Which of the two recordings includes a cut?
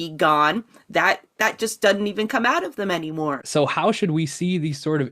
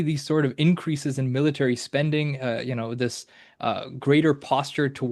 first; 1 cut; at 3.4 s

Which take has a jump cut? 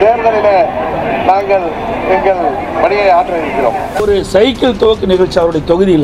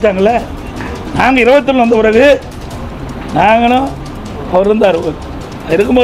first; 1 cut; at 4.0 s

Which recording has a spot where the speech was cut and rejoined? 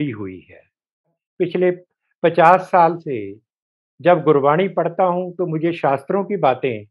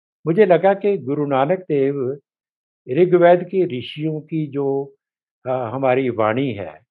first; 1 cut; at 1.2 s

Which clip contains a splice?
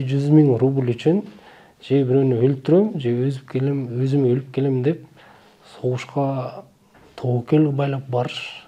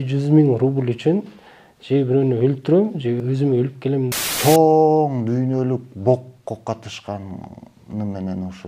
second; 2 cuts; at 3.2 s, 4.1 s

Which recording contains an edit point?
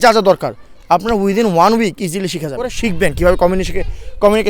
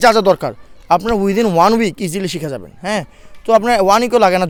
first; 1 cut; at 2.7 s

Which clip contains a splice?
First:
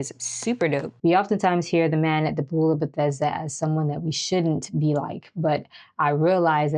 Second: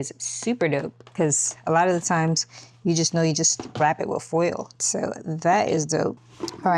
first; 1 cut; at 0.9 s

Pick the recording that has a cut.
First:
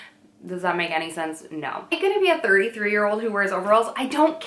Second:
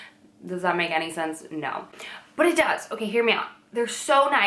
first; 1 cut; at 2.0 s

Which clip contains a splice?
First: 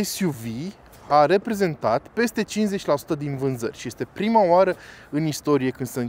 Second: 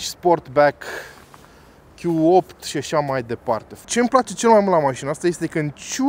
second; 1 cut; at 3.7 s

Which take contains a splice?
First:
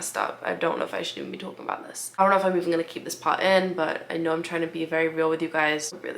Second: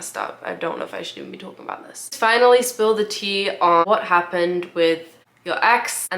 second; 2 cuts; at 2.1 s, 3.8 s

